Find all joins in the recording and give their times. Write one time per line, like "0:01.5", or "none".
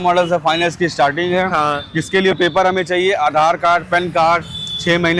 none